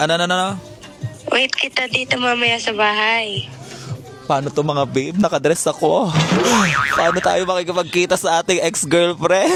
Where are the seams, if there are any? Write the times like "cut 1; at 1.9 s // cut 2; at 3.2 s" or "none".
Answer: none